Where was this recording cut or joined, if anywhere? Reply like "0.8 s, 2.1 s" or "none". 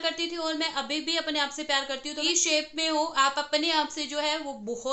2.2 s